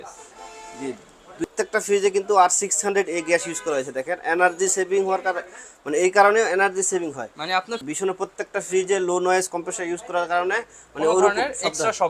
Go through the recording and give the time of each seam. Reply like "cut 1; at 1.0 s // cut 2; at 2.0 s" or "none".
cut 1; at 1.4 s // cut 2; at 7.8 s